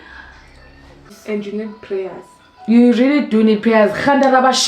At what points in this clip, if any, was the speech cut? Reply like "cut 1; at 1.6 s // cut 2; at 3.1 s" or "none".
cut 1; at 1.2 s